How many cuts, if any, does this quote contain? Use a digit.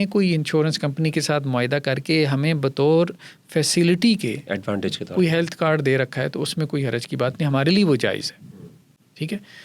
0